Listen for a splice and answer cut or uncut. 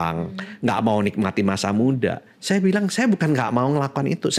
uncut